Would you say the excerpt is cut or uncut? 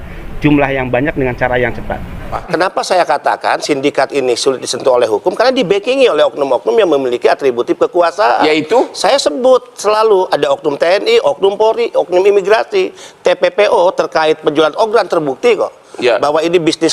cut